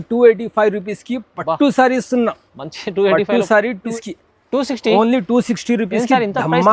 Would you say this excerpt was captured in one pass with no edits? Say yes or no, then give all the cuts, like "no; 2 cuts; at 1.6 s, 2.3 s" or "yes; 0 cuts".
no; 1 cut; at 3.9 s